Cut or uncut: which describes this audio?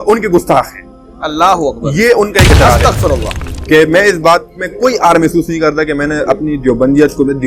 cut